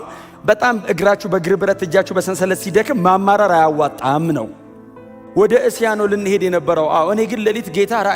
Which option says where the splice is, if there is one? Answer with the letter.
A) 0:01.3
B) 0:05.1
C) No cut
B